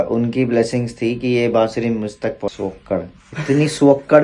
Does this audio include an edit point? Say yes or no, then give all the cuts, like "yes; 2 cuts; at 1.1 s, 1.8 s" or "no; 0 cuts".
yes; 1 cut; at 2.5 s